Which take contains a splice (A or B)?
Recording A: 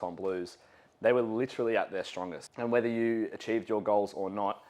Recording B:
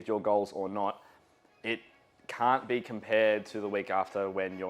A